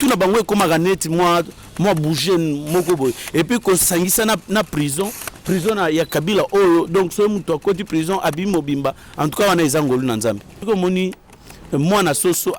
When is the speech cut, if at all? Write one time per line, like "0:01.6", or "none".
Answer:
0:10.6